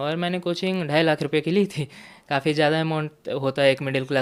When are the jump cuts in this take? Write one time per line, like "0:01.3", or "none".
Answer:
none